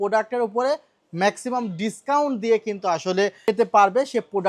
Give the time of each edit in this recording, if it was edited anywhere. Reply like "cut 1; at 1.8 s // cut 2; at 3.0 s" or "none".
cut 1; at 3.5 s